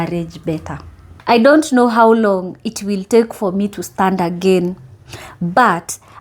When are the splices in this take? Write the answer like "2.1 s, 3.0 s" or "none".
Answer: 1.1 s